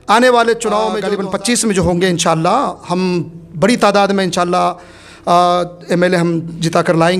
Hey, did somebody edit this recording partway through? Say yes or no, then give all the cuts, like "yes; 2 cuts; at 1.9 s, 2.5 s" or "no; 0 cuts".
yes; 1 cut; at 1.1 s